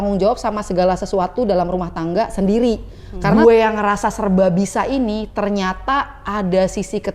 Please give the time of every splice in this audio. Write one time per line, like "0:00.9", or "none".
0:03.3